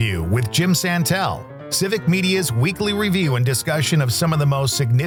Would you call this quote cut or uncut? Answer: uncut